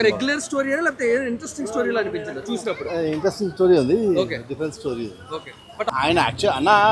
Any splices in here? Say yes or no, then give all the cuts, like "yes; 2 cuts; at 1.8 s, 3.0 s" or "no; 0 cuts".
yes; 1 cut; at 5.9 s